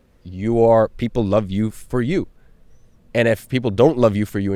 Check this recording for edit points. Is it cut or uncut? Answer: uncut